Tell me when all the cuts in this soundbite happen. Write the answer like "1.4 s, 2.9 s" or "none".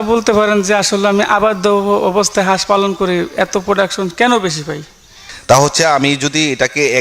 5.2 s